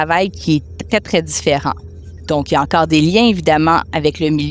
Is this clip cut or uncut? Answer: uncut